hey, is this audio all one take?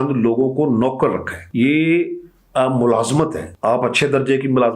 no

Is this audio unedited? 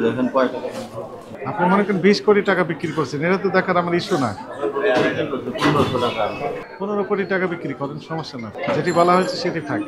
yes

